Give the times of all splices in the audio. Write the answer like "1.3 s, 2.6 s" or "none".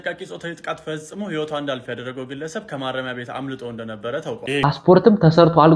4.8 s